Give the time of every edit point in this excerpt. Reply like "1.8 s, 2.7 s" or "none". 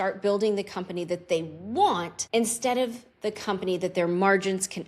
2.1 s